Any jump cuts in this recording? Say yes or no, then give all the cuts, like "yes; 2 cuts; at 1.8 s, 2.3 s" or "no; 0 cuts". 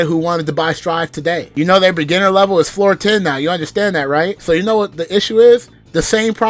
yes; 1 cut; at 4.3 s